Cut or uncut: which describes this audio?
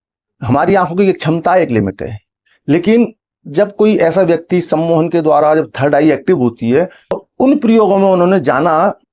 cut